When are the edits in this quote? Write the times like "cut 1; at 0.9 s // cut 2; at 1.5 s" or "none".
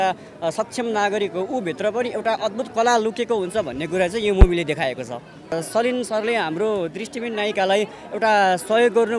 cut 1; at 5.5 s